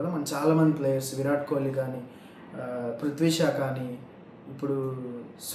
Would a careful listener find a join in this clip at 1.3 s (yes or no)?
no